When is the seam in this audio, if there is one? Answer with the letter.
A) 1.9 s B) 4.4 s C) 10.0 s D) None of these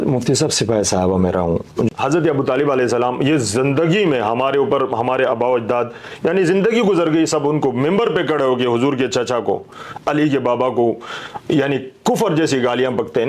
A